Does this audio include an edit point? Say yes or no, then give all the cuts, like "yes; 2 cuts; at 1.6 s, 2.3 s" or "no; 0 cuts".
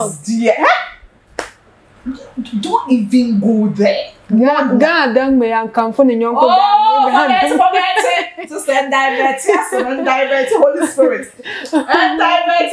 no; 0 cuts